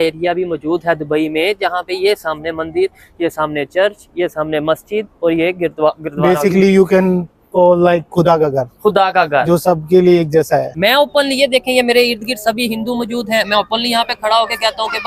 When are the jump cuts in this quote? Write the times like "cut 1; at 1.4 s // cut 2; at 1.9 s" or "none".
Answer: cut 1; at 10.7 s